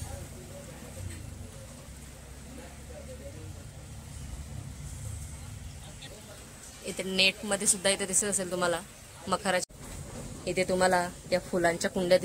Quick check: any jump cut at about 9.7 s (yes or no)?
yes